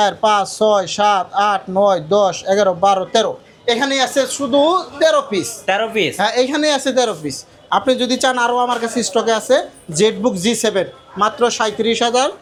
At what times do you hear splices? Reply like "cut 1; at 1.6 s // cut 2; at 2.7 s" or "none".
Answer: none

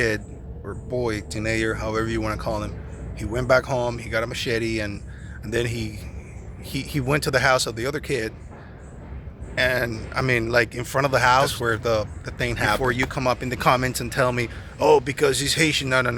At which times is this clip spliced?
cut 1; at 11.5 s // cut 2; at 12.8 s

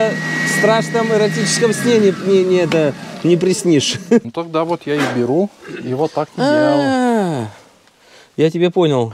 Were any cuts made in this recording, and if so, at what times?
cut 1; at 4.2 s

